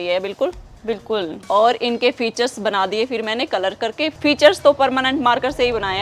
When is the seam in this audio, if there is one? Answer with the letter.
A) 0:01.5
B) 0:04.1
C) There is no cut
B